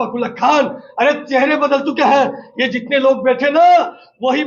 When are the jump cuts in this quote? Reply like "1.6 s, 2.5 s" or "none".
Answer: none